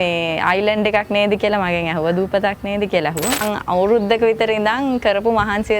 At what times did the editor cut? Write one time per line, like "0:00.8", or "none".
0:03.4